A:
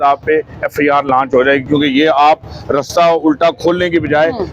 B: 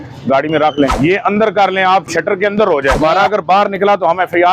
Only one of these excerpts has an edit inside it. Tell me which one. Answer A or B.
B